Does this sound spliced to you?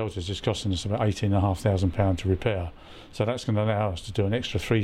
no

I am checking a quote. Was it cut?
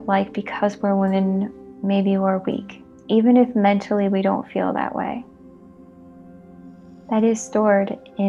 no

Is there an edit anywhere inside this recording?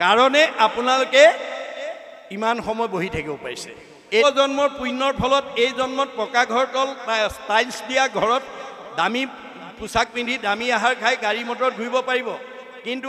yes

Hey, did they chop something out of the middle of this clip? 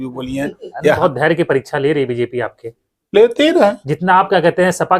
yes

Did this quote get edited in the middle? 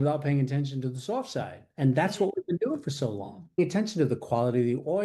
yes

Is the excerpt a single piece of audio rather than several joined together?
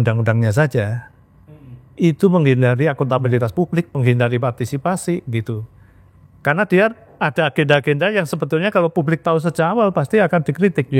yes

